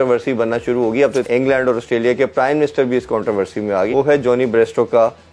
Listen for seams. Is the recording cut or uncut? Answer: cut